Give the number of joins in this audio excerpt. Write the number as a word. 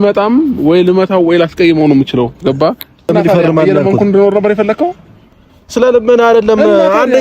one